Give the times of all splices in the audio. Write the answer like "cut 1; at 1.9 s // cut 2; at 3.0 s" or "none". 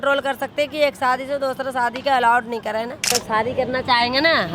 cut 1; at 3.1 s